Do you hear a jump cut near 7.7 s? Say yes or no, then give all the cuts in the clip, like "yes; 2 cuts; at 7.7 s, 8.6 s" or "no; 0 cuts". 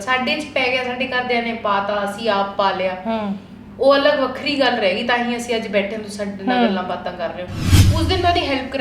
yes; 1 cut; at 7.7 s